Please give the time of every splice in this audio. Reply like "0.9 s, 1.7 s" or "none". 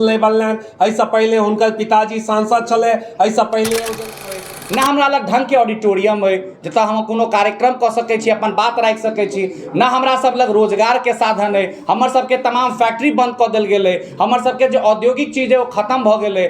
4.2 s